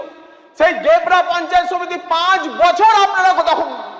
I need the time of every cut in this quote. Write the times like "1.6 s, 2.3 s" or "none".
none